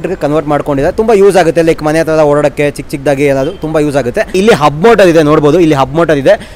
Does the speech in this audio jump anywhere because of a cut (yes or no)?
yes